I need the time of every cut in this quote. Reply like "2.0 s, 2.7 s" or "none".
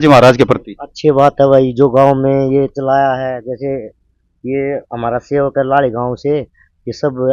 none